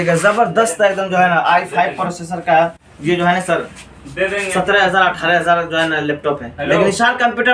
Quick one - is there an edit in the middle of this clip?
no; 0 cuts

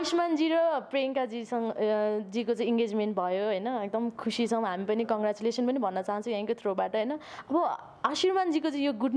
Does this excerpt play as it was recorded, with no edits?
yes; 0 cuts

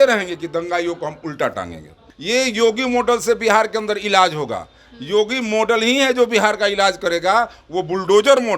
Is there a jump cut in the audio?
yes; 1 cut; at 2.1 s

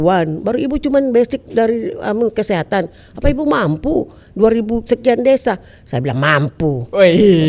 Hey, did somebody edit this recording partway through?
no; 0 cuts

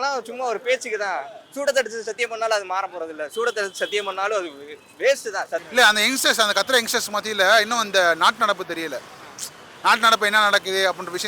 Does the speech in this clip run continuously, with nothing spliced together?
no; 1 cut; at 5.7 s

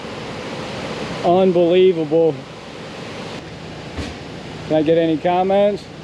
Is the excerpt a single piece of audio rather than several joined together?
no; 1 cut; at 3.4 s

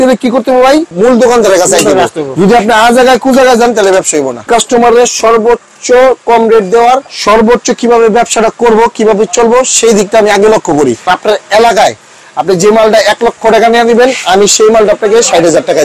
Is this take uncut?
no; 4 cuts; at 0.9 s, 4.5 s, 7.1 s, 11.0 s

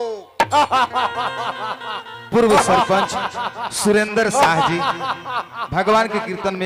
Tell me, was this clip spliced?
no; 0 cuts

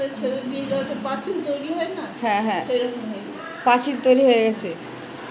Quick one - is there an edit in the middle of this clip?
no; 0 cuts

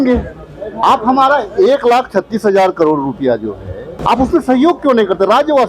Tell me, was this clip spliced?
yes; 2 cuts; at 0.8 s, 3.9 s

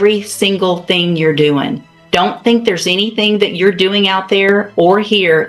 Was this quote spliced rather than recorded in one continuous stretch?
no; 0 cuts

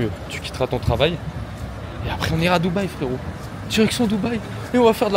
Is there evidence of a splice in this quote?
no; 0 cuts

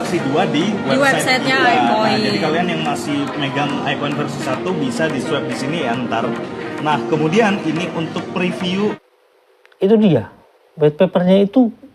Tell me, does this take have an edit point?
yes; 1 cut; at 9.0 s

